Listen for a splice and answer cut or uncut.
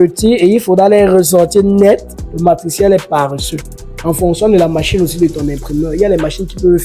uncut